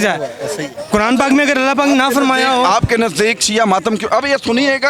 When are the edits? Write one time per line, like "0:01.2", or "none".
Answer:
none